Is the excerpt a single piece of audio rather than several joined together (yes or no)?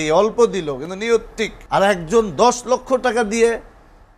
no